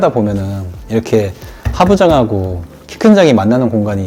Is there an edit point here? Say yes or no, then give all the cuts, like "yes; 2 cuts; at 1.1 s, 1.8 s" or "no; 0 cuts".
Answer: no; 0 cuts